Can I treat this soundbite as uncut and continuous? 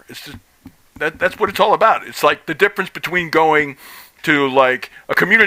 yes; 0 cuts

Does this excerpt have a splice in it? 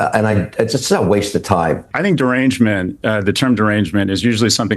yes; 1 cut; at 1.9 s

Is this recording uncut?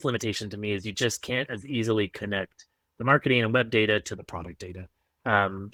yes; 0 cuts

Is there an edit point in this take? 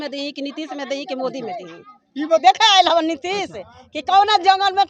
yes; 1 cut; at 2.4 s

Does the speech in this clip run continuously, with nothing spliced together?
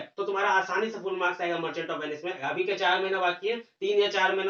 no; 1 cut; at 2.4 s

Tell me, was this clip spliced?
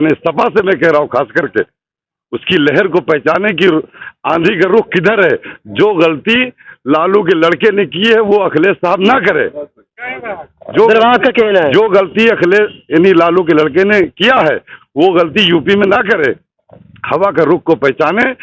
no; 0 cuts

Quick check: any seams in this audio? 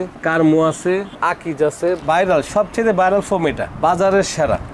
yes; 1 cut; at 2.0 s

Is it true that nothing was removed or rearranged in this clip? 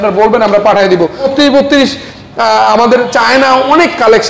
no; 1 cut; at 1.3 s

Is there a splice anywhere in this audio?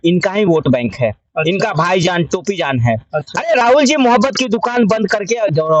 no; 0 cuts

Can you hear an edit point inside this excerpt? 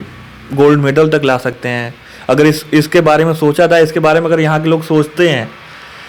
no; 0 cuts

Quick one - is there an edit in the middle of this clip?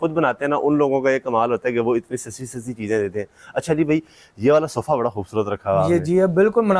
no; 0 cuts

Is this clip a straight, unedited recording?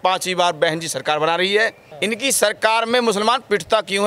no; 1 cut; at 1.9 s

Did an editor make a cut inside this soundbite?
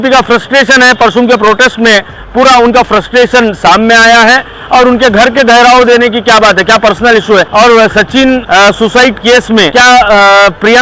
yes; 3 cuts; at 7.5 s, 8.4 s, 9.7 s

